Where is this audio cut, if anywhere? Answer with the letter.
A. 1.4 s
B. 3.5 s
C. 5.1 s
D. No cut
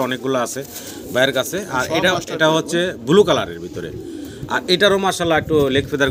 D